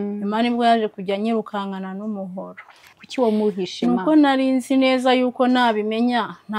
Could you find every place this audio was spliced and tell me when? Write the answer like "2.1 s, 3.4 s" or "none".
2.8 s